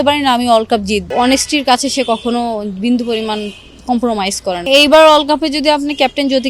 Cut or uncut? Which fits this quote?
cut